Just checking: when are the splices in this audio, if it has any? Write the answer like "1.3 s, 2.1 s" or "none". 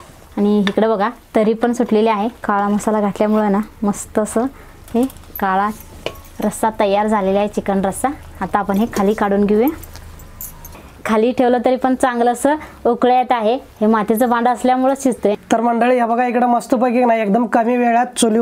2.4 s, 10.8 s, 15.3 s

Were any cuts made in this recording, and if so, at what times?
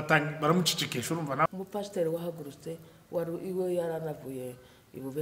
1.5 s

